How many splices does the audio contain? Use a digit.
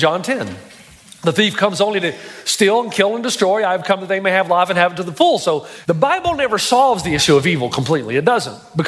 1